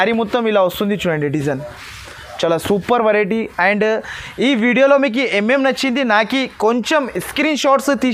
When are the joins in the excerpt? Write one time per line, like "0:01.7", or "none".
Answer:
none